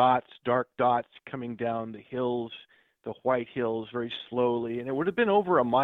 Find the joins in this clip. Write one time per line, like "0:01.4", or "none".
none